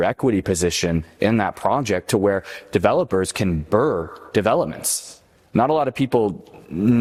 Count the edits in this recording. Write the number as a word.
zero